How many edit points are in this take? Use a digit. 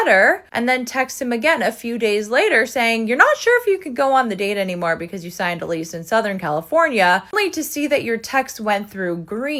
0